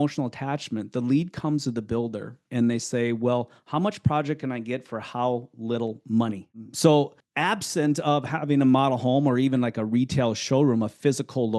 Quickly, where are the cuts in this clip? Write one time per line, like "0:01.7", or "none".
0:06.5
0:07.2